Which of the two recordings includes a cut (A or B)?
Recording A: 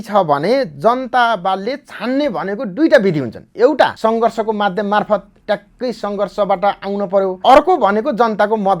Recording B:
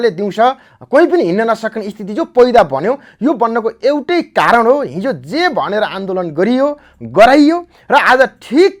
A